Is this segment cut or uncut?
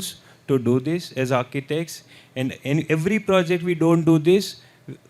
uncut